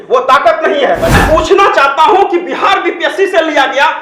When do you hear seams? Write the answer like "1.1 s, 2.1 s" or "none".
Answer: 1.2 s